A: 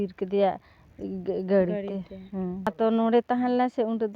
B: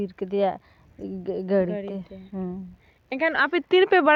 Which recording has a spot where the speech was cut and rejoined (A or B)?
A